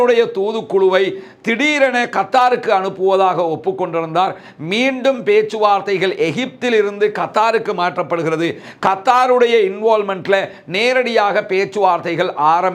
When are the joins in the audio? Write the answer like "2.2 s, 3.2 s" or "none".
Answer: none